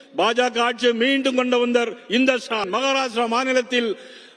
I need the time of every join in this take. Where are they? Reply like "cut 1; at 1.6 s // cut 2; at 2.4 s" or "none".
cut 1; at 2.7 s